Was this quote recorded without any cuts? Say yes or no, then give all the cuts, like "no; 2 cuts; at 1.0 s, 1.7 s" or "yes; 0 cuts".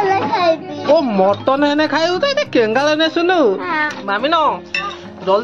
no; 1 cut; at 4.0 s